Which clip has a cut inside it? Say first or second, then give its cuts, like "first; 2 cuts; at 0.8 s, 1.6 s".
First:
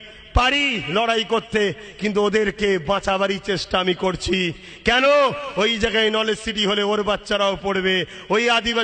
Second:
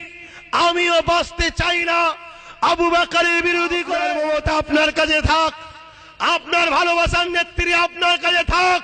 second; 1 cut; at 4.0 s